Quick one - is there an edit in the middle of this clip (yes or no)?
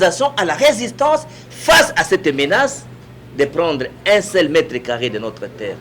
no